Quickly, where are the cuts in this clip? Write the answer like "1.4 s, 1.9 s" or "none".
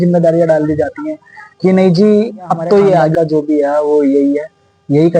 3.1 s